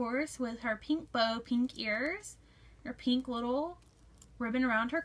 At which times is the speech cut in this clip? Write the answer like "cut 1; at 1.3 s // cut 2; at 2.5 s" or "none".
cut 1; at 3.4 s